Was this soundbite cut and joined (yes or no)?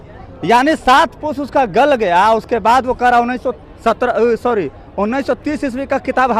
no